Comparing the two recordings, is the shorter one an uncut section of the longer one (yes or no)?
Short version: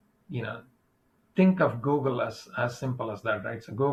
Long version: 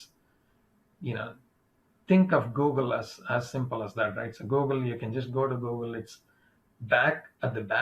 yes